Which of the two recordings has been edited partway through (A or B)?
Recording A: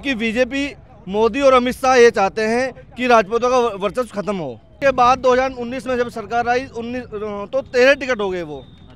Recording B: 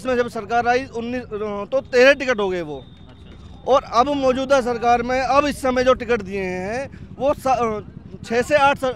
A